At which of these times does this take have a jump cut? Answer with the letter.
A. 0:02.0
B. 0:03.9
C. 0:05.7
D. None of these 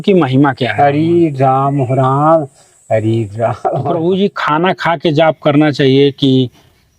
B